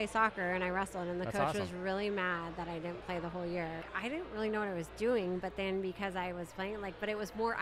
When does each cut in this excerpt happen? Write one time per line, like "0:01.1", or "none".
0:03.9